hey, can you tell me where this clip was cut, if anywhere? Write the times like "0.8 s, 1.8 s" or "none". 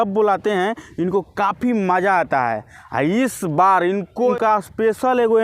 4.3 s